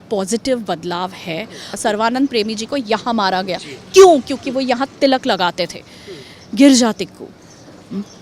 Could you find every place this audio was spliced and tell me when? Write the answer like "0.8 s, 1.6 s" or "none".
1.7 s